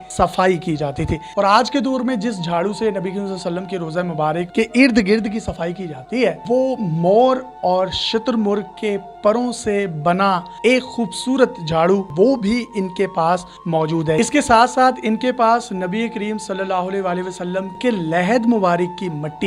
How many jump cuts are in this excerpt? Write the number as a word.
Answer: six